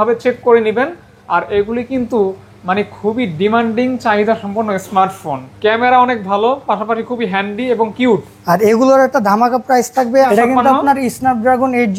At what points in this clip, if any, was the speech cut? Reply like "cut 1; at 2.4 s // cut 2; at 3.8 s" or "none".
cut 1; at 5.4 s // cut 2; at 10.3 s